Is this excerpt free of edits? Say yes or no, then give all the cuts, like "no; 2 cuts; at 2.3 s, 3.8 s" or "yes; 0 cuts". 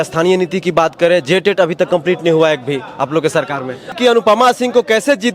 no; 1 cut; at 3.9 s